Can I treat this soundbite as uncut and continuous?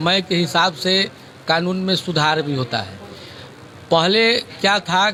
yes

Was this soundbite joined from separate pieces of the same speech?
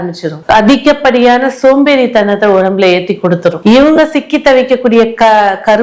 no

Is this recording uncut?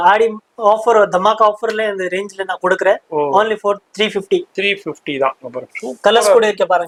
yes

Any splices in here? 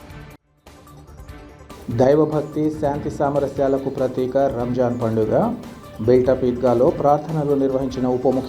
yes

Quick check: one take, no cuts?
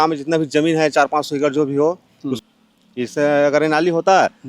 no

